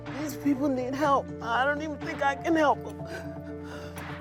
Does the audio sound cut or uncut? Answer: uncut